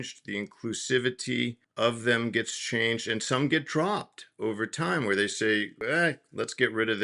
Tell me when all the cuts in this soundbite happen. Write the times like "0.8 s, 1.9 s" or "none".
1.6 s, 5.7 s